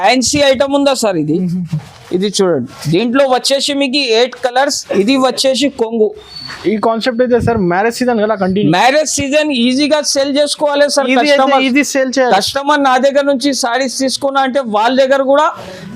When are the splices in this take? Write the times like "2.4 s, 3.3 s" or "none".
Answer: 5.6 s